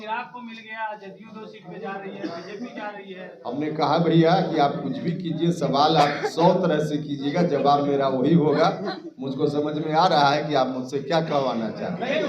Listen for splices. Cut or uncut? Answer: uncut